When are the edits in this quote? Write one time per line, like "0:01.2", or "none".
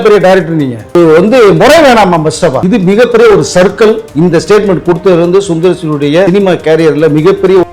0:00.9
0:02.6
0:04.1
0:06.3